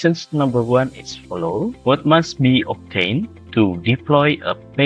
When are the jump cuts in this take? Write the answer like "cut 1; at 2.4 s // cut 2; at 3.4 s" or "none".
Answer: cut 1; at 1.8 s